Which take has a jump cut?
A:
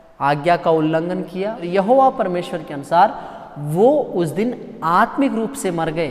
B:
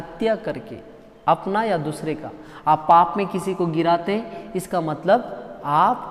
A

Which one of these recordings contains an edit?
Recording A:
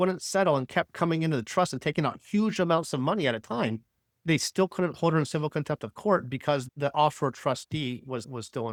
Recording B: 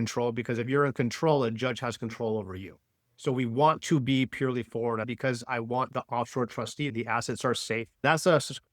B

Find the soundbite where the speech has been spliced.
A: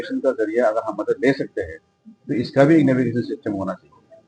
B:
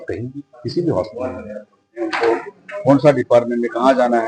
B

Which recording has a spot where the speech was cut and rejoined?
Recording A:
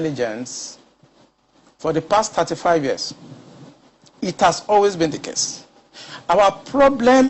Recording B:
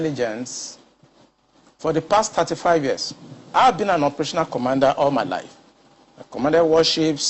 B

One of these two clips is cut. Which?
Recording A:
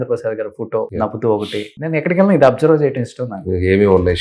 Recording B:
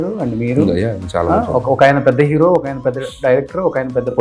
A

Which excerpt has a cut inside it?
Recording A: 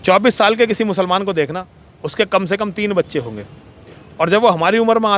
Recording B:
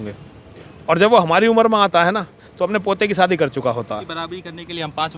B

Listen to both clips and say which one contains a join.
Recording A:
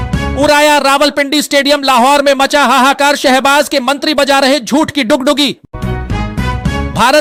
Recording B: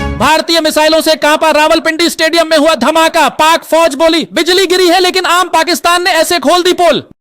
B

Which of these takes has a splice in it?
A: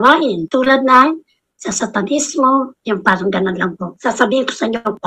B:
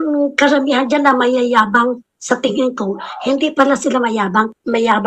A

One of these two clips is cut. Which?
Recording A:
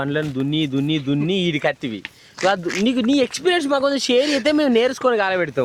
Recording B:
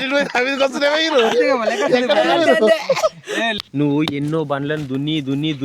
B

